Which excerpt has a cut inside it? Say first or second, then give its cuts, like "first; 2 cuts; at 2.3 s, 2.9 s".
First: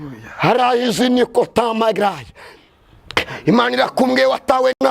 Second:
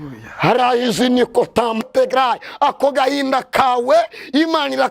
second; 1 cut; at 1.8 s